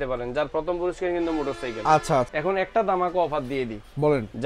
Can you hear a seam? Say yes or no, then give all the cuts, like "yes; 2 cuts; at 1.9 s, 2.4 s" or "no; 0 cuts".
yes; 1 cut; at 2.3 s